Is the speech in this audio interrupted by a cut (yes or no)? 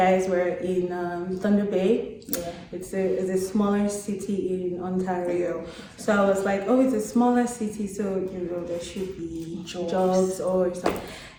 no